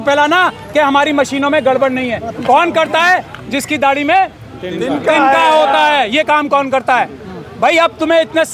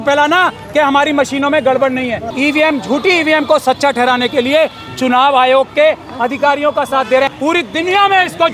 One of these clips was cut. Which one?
second; 2 cuts; at 2.2 s, 7.3 s

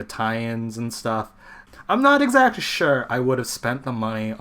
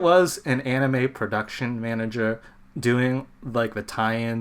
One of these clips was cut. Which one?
first; 1 cut; at 1.5 s

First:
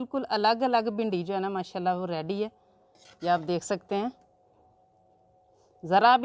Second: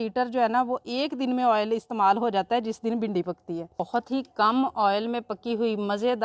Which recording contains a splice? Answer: second; 1 cut; at 3.8 s

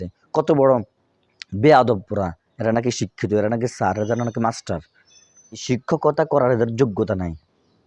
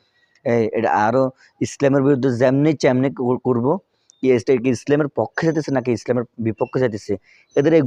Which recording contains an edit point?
first; 1 cut; at 5.6 s

